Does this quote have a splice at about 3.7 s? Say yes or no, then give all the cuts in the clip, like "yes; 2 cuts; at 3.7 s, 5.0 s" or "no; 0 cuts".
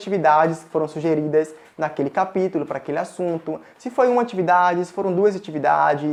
no; 0 cuts